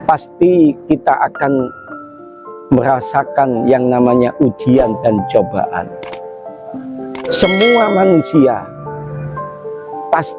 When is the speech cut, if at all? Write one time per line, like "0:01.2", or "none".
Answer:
none